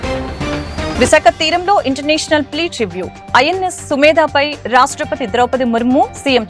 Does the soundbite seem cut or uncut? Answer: cut